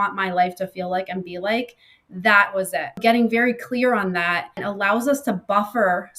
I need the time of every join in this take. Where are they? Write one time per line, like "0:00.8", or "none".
0:03.0
0:04.7